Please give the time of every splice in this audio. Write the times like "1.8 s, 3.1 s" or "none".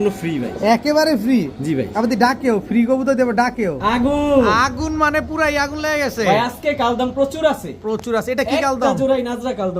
3.8 s